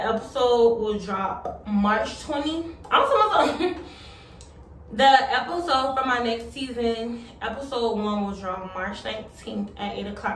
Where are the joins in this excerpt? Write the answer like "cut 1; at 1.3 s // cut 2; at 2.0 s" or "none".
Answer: none